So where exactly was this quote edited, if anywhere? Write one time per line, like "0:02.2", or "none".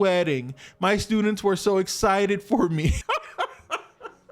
0:03.0